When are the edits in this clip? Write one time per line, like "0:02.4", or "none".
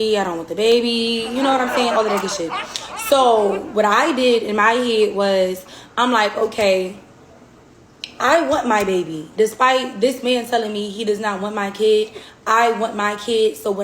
0:01.2
0:12.3